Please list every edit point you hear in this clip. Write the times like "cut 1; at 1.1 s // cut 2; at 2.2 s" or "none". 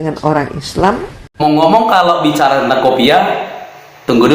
cut 1; at 1.4 s